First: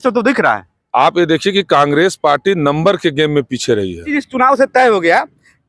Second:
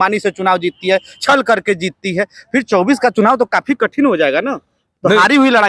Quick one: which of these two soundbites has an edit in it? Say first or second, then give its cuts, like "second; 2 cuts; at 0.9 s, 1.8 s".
first; 1 cut; at 4.0 s